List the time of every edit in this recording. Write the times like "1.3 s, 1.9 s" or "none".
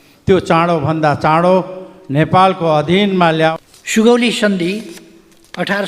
3.5 s